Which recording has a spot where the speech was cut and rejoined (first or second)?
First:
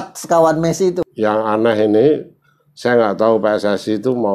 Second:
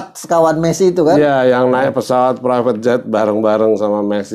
first